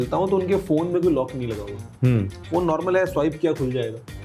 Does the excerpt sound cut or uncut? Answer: uncut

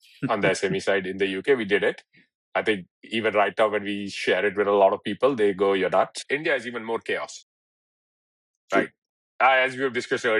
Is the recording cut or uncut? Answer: cut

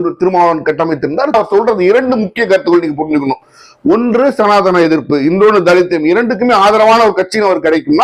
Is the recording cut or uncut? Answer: cut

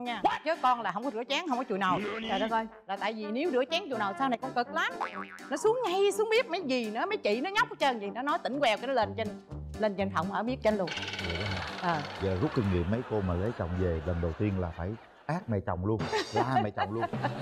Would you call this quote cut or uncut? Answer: uncut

